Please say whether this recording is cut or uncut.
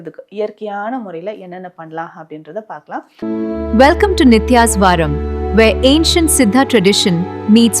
cut